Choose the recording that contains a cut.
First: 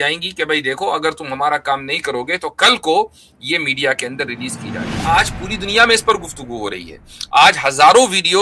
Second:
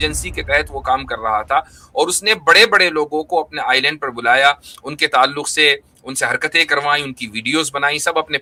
first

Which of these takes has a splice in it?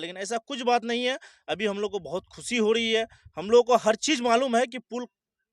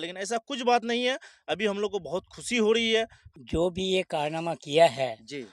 second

